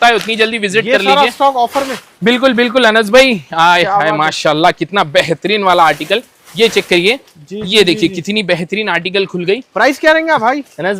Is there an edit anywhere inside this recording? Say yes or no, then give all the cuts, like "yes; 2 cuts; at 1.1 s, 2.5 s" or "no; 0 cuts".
no; 0 cuts